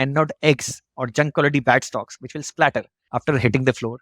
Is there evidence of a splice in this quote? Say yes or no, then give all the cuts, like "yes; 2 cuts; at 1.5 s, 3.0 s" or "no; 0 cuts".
yes; 1 cut; at 3.0 s